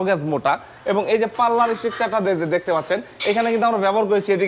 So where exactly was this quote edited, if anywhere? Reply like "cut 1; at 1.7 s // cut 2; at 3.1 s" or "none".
none